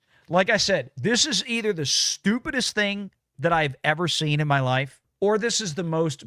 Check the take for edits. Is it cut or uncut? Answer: cut